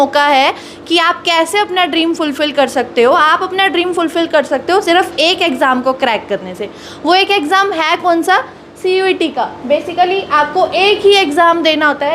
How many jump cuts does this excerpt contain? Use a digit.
0